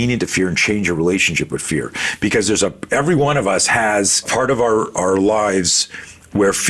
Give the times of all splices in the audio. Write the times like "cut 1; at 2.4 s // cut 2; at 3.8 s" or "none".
cut 1; at 4.2 s